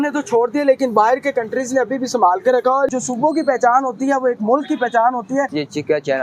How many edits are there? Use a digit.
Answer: 2